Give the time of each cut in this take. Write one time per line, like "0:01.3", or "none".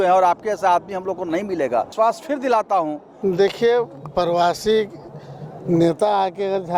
0:03.1